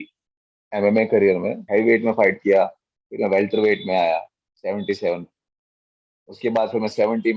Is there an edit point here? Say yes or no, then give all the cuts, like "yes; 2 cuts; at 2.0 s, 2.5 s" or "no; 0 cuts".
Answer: yes; 1 cut; at 1.6 s